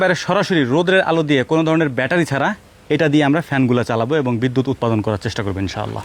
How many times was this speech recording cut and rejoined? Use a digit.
0